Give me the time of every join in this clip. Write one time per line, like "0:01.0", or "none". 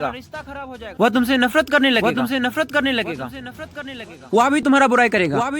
0:00.9
0:04.3